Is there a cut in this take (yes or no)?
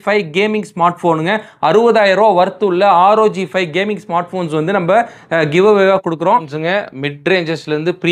yes